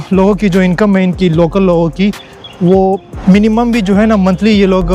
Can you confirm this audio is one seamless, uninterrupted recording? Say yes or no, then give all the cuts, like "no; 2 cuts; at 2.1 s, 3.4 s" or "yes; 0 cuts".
no; 1 cut; at 3.1 s